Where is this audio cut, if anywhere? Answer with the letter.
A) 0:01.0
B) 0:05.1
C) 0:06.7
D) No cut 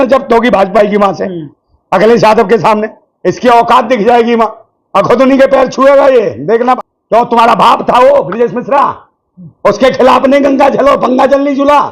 C